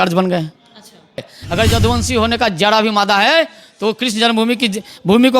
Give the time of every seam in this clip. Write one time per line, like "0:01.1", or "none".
0:01.3